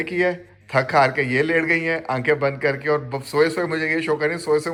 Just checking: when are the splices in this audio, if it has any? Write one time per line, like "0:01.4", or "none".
none